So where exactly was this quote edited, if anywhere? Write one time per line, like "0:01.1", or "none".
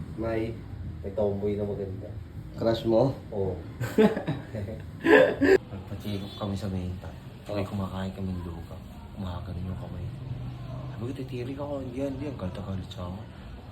0:05.6